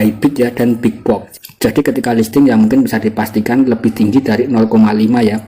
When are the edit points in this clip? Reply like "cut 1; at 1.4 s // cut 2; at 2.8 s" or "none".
cut 1; at 1.3 s

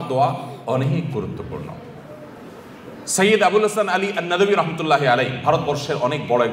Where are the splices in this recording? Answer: none

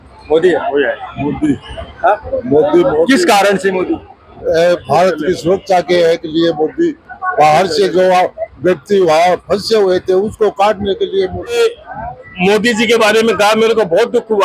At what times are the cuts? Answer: cut 1; at 1.0 s // cut 2; at 11.5 s

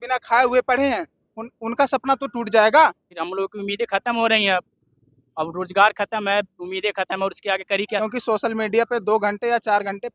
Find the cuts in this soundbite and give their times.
cut 1; at 3.1 s // cut 2; at 8.0 s

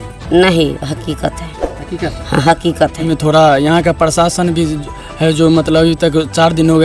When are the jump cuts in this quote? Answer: cut 1; at 3.1 s

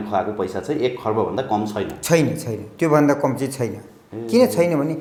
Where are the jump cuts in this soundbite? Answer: none

